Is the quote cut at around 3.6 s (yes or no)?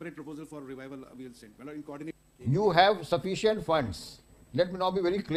no